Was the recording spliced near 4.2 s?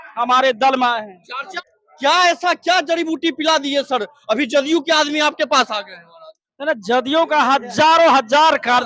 no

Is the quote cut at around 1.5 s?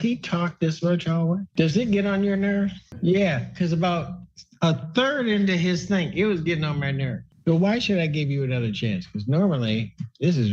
yes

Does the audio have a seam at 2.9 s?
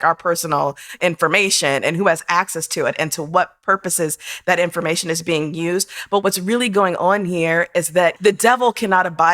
no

